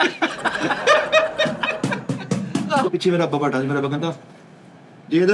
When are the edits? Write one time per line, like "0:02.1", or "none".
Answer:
0:02.8